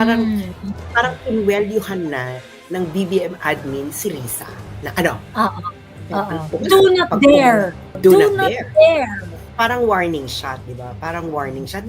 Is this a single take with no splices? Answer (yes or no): no